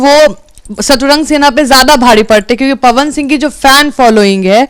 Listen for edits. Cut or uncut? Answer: uncut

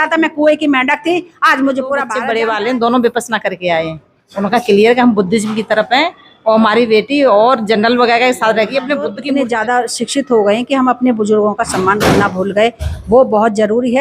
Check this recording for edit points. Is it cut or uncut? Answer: cut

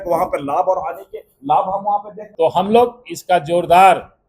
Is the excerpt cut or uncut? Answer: cut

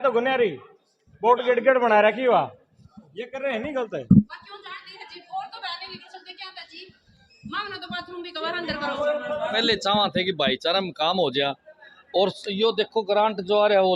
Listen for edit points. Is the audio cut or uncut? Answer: uncut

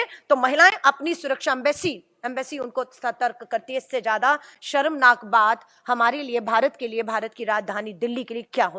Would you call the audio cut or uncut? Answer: uncut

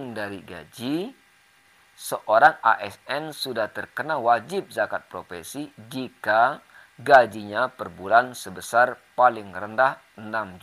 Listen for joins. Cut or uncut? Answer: cut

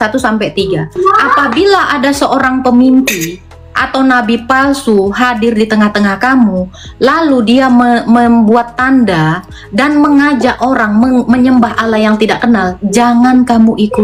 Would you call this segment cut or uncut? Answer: uncut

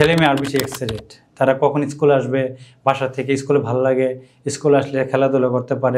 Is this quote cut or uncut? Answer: uncut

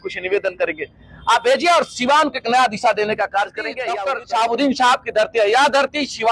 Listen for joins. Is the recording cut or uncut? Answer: cut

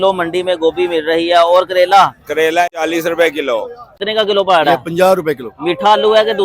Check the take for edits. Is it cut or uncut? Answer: cut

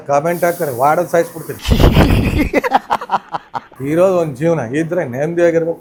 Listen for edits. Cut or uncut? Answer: uncut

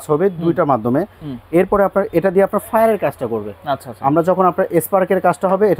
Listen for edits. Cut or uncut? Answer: uncut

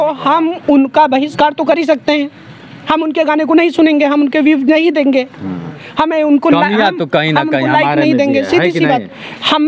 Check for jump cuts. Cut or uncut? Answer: uncut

